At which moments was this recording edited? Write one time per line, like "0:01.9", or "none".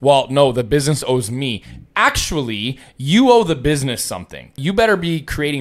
0:04.6